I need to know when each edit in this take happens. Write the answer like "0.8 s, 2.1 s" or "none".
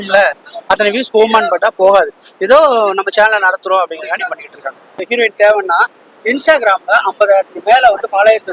5.0 s

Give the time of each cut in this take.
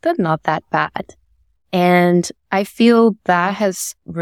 none

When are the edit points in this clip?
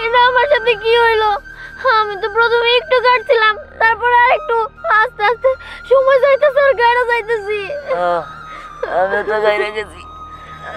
none

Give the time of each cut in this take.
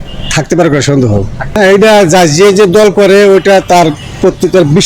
1.5 s

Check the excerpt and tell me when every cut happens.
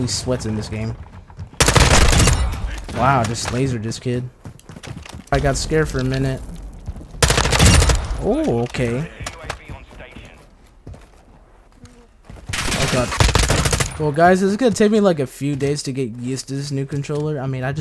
5.3 s, 13.1 s

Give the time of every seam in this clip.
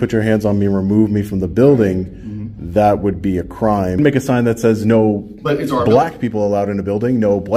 4.0 s

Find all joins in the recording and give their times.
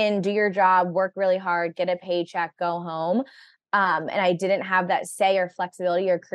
none

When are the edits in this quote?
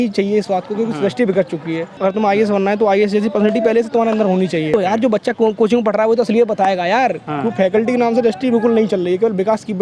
1.9 s, 4.7 s, 7.3 s

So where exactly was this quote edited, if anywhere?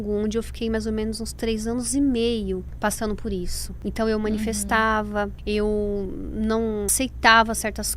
2.7 s, 3.6 s, 5.4 s, 6.9 s

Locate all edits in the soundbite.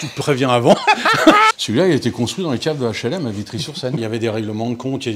1.6 s, 4.0 s

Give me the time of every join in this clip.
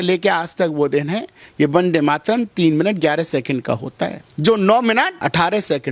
4.2 s, 5.1 s

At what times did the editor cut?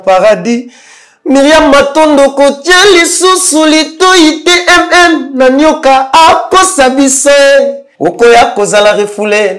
7.8 s

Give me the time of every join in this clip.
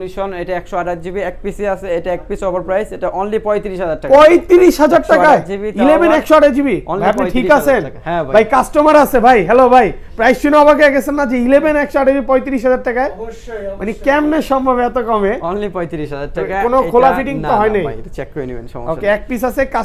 none

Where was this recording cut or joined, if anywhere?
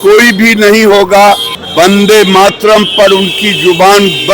1.6 s

